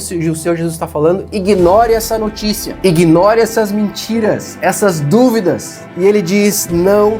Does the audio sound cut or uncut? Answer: cut